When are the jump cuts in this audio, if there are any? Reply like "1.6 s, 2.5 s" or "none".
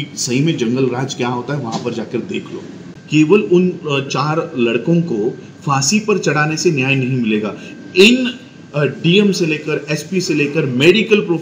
2.9 s

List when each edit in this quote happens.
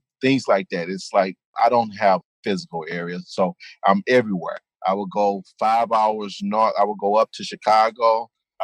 1.5 s, 2.3 s

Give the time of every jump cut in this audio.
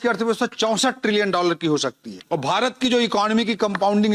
2.1 s

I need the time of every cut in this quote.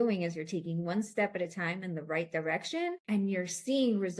3.0 s

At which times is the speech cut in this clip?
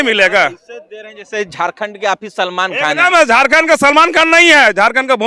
none

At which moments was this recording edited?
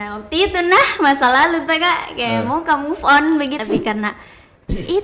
3.6 s

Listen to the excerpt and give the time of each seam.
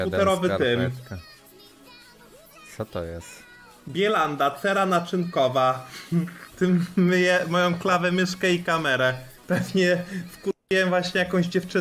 none

